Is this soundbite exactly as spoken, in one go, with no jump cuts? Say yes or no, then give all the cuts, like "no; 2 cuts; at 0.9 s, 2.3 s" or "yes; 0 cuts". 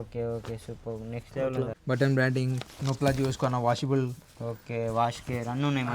no; 1 cut; at 1.8 s